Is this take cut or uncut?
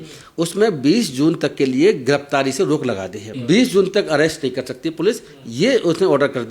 cut